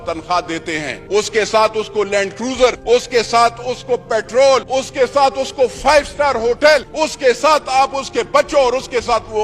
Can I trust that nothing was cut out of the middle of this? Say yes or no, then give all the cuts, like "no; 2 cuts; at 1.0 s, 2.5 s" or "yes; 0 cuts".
no; 4 cuts; at 0.9 s, 2.8 s, 4.7 s, 6.9 s